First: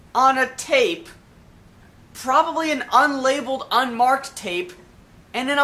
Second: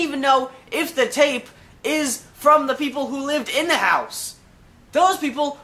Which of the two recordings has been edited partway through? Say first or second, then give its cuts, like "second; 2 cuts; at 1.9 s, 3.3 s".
first; 1 cut; at 4.7 s